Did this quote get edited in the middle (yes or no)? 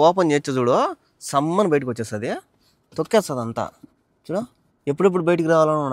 no